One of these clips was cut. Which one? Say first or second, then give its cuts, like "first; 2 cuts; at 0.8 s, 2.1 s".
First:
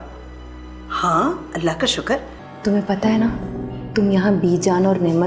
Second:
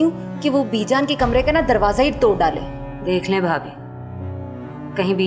first; 1 cut; at 2.4 s